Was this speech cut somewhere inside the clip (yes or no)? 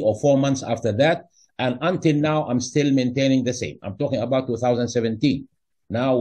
no